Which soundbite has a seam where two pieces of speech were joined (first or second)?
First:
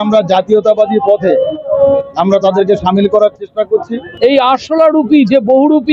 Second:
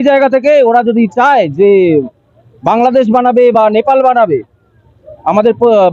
first